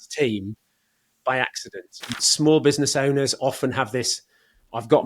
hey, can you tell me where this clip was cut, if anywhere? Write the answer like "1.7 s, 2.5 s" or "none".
2.1 s